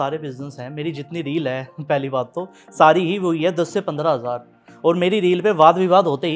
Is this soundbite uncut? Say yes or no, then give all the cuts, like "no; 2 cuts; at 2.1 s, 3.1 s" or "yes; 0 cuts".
yes; 0 cuts